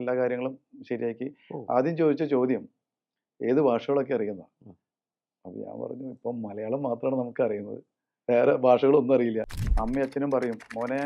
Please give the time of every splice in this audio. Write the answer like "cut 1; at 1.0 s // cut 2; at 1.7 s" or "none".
cut 1; at 9.5 s

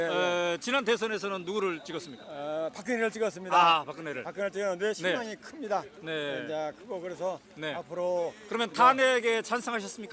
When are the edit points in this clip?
cut 1; at 3.1 s

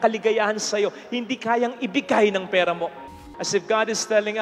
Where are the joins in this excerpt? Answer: cut 1; at 3.0 s

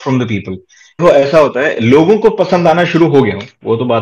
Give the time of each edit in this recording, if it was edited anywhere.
cut 1; at 1.0 s

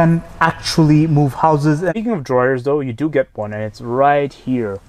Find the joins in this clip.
cut 1; at 1.9 s

